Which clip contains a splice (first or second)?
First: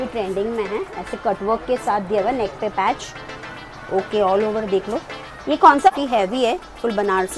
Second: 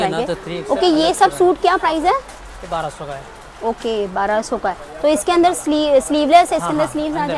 first